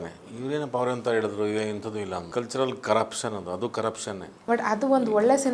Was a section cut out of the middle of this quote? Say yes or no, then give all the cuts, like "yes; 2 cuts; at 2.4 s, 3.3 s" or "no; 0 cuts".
yes; 2 cuts; at 2.3 s, 4.3 s